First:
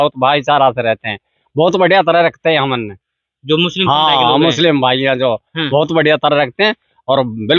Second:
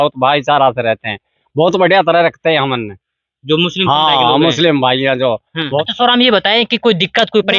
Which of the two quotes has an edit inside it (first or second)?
second